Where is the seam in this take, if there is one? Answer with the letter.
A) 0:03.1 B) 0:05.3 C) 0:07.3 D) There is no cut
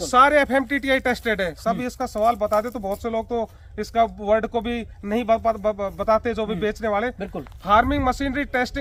D